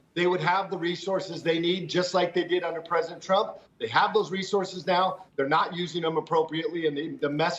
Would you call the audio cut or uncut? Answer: uncut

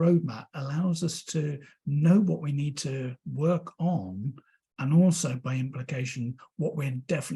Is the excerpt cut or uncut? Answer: uncut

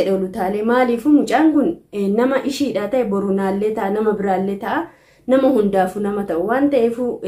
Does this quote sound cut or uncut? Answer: uncut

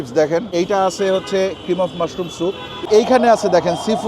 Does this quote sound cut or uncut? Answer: cut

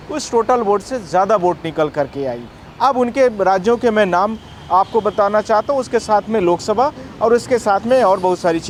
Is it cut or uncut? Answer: uncut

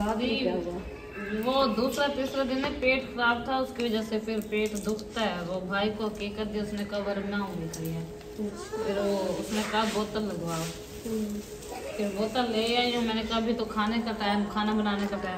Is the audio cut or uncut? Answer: uncut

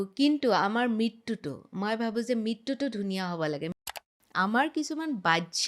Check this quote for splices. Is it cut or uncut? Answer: cut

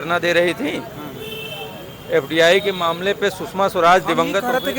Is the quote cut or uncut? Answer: uncut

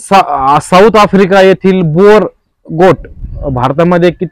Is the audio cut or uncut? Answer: uncut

